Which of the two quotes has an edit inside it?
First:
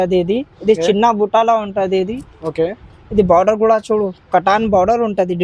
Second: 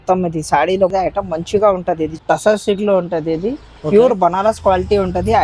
second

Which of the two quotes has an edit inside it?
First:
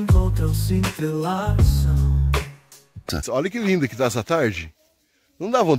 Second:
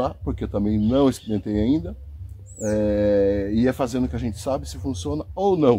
first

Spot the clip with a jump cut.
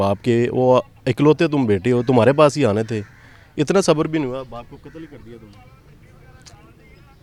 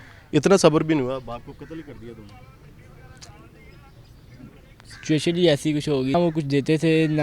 second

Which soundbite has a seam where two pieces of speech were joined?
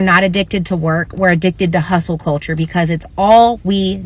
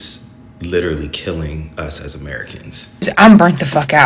second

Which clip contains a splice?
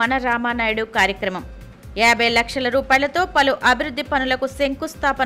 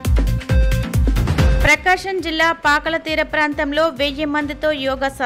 second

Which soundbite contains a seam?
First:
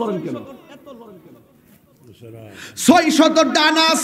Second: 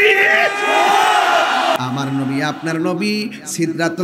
second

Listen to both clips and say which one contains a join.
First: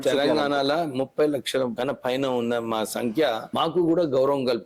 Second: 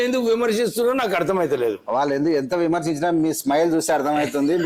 first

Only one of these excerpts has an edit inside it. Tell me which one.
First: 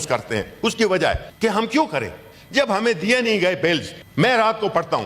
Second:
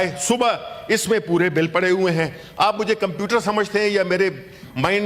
first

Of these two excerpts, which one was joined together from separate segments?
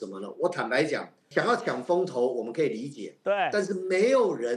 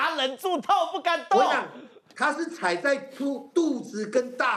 first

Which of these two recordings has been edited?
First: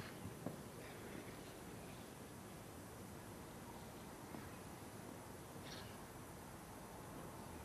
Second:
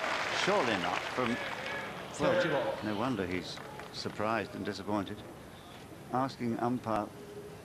first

